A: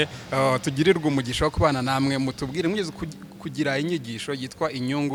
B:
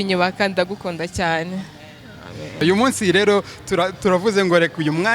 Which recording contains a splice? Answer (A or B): B